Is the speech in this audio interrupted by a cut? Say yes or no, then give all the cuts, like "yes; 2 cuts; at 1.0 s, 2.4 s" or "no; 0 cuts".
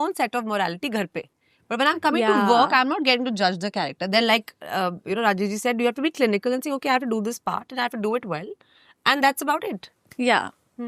no; 0 cuts